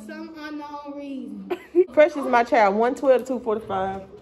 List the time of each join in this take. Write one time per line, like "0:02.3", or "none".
0:01.9

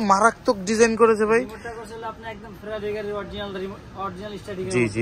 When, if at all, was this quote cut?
none

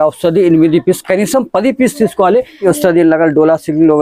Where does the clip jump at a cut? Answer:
0:02.6

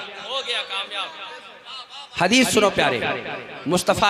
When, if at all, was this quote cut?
none

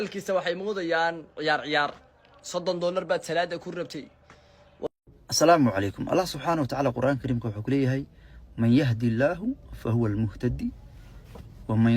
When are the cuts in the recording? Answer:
0:04.9

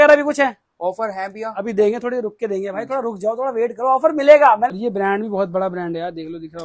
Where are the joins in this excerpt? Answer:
0:04.7

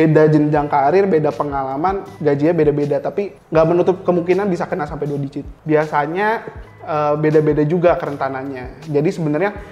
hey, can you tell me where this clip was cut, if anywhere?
0:05.5

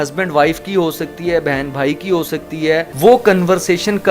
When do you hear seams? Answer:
0:02.9

